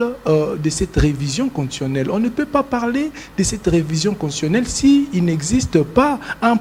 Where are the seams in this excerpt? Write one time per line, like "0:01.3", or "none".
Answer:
none